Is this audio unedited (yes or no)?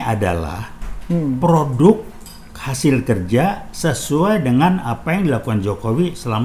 yes